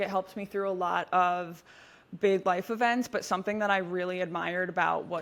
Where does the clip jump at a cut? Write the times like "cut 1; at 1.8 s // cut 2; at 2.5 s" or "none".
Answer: none

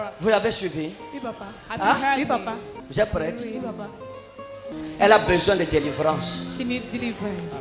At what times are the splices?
cut 1; at 2.7 s // cut 2; at 4.7 s

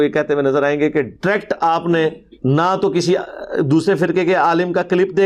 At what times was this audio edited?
cut 1; at 2.3 s

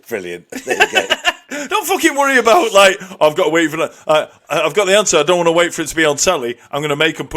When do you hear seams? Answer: none

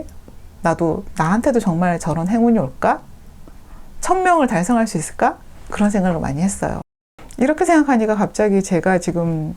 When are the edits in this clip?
cut 1; at 6.8 s

